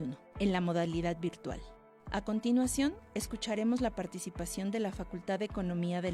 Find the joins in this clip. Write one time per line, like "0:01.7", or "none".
none